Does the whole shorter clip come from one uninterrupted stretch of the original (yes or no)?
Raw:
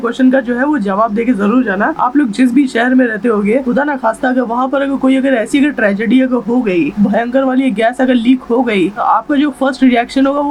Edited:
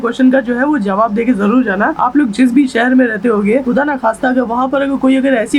yes